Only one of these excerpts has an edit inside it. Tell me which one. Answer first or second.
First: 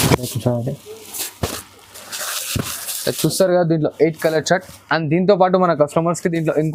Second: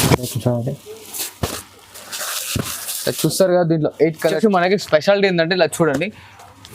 second